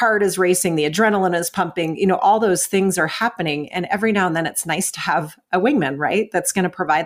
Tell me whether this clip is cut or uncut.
uncut